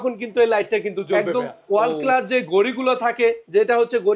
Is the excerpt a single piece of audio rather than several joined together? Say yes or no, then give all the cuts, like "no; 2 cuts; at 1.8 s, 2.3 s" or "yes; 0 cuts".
no; 1 cut; at 1.1 s